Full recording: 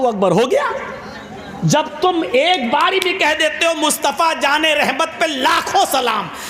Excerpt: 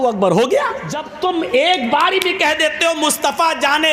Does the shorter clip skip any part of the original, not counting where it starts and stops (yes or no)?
yes